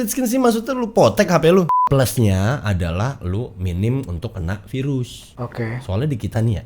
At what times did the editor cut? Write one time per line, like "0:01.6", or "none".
0:01.7